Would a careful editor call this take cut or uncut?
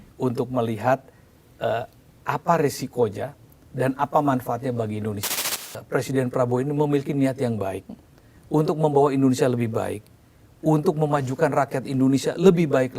cut